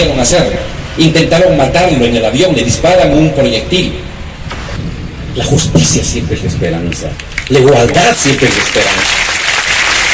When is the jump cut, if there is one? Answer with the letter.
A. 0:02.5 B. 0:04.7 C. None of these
B